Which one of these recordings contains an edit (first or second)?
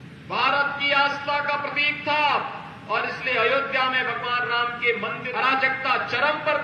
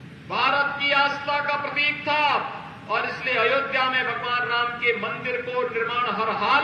first